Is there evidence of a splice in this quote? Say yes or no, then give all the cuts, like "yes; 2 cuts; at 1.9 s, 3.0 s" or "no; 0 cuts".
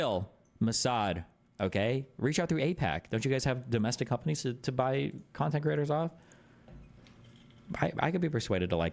no; 0 cuts